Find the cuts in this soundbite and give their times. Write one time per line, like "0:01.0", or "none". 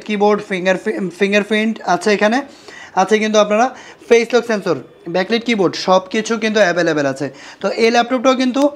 none